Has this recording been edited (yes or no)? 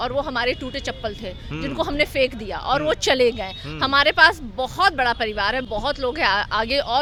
no